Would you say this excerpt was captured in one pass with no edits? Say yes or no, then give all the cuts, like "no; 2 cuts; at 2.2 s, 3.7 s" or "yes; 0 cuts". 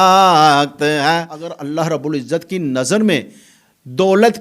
no; 1 cut; at 1.6 s